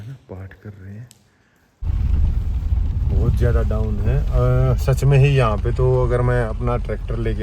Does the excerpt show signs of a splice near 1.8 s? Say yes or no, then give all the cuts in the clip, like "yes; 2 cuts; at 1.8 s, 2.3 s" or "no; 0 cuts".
yes; 1 cut; at 1.8 s